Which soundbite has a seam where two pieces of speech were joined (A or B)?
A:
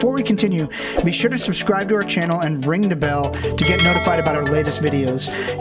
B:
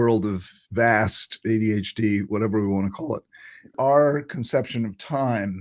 B